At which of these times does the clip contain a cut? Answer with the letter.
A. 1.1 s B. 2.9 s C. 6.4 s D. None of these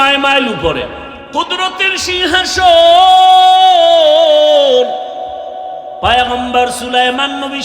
A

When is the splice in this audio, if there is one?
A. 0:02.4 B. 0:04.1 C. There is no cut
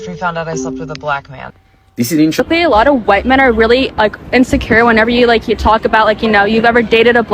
A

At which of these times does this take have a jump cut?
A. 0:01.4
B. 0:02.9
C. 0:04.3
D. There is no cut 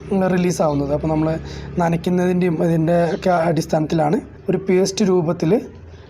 C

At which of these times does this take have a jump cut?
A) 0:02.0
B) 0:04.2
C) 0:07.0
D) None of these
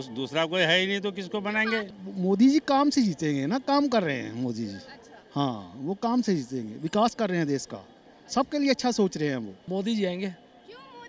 A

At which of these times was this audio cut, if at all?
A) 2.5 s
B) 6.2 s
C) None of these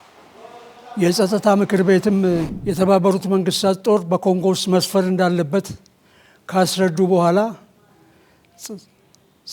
A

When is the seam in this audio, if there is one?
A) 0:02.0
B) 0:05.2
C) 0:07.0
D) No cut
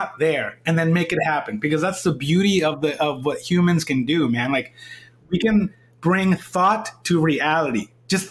D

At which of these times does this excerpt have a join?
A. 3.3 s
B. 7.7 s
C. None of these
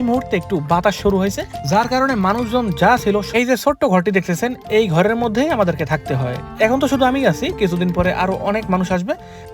A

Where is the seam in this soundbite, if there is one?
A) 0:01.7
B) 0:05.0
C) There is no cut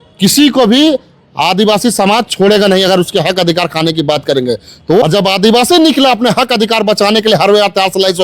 B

